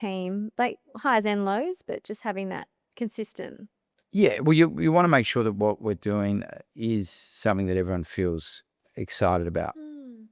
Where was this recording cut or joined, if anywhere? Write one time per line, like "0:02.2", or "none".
0:06.6